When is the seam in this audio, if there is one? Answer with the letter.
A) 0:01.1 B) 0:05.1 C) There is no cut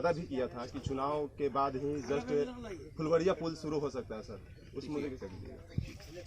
C